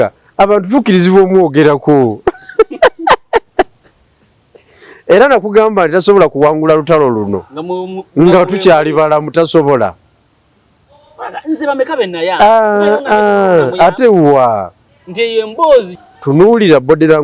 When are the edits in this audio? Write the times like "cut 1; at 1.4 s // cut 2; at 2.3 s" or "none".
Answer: cut 1; at 15.9 s